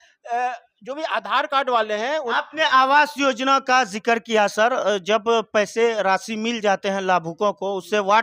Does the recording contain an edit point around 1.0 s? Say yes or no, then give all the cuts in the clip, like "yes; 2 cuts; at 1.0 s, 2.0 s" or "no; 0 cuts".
no; 1 cut; at 2.3 s